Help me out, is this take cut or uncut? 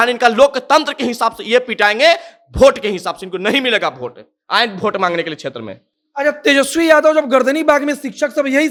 uncut